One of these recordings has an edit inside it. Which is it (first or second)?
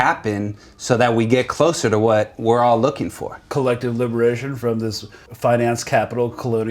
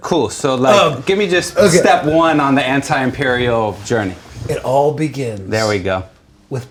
first